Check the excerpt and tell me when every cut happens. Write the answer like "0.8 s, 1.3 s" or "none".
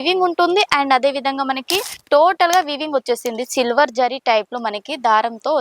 1.9 s